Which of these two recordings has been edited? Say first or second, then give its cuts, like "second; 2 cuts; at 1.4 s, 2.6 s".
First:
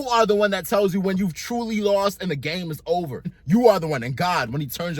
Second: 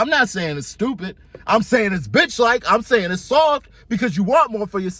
first; 1 cut; at 3.4 s